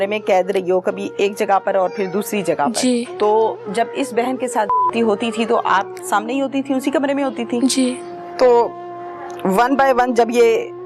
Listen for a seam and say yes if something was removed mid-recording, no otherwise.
yes